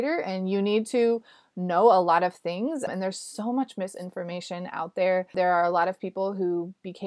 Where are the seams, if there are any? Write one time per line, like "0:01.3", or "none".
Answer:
0:02.9
0:05.3